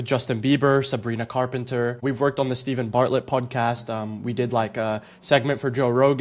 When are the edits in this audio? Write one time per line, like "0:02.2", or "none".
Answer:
0:02.0